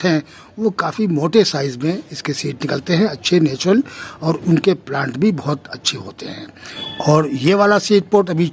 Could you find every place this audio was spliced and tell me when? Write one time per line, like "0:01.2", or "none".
0:06.9